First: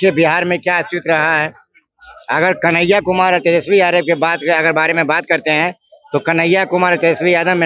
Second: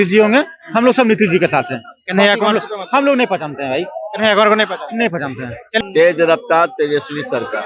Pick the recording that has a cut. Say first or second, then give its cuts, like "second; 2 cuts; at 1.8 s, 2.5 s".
second; 1 cut; at 5.7 s